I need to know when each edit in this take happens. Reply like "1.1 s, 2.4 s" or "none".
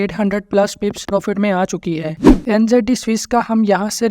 1.0 s, 2.2 s